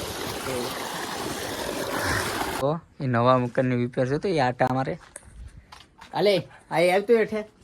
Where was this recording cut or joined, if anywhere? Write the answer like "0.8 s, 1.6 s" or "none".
2.6 s